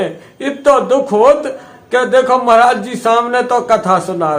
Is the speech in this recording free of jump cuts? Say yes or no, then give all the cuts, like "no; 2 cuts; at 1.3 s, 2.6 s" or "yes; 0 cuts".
yes; 0 cuts